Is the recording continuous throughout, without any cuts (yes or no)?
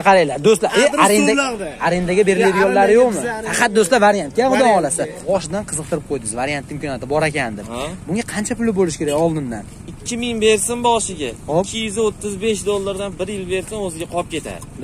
no